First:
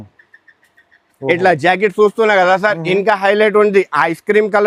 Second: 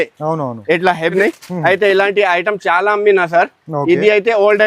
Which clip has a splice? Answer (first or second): second